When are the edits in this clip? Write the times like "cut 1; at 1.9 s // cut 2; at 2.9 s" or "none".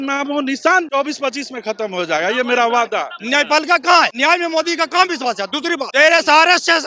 cut 1; at 0.9 s // cut 2; at 3.2 s // cut 3; at 4.1 s // cut 4; at 5.9 s

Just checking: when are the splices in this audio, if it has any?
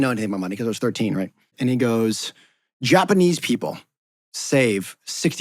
cut 1; at 1.5 s

